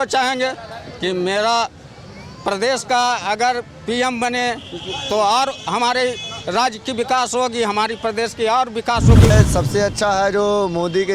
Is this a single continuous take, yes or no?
no